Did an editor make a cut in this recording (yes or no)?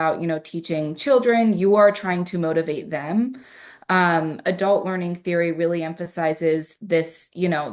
no